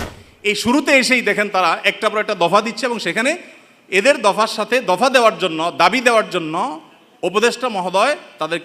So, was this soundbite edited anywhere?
no; 0 cuts

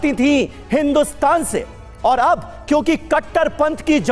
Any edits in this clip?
no; 0 cuts

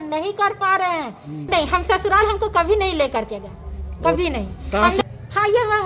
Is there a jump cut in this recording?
yes; 2 cuts; at 1.3 s, 5.0 s

